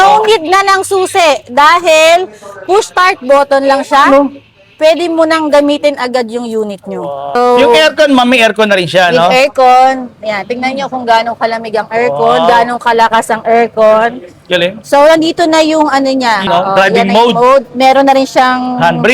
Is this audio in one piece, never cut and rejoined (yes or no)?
yes